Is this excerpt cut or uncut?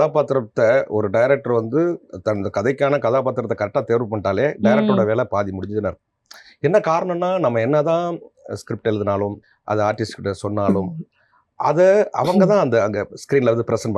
uncut